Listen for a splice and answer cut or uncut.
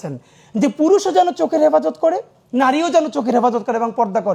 uncut